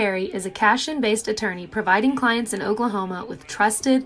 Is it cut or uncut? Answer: cut